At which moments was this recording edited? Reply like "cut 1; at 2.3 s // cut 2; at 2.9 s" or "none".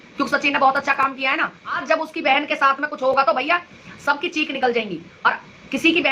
cut 1; at 1.8 s